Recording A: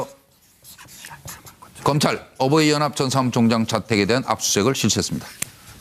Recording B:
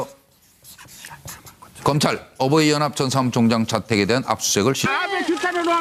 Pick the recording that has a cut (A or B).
A